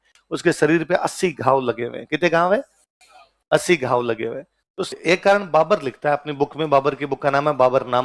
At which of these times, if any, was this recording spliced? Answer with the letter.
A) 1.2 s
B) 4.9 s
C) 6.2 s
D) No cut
B